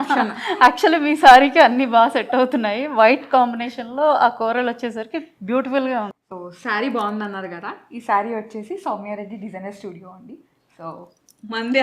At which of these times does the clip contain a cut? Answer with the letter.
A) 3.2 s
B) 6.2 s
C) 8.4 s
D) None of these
B